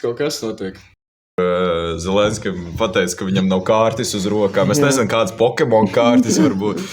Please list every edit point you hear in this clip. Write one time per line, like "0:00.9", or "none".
0:01.4